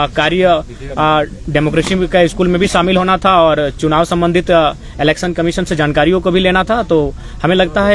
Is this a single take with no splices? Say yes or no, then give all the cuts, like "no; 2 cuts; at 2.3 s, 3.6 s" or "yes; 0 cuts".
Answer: yes; 0 cuts